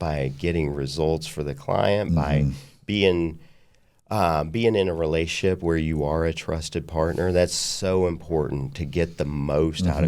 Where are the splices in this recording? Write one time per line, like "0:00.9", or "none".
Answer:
none